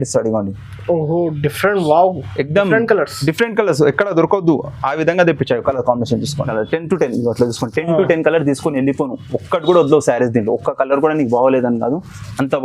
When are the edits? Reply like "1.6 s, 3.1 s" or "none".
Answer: 6.5 s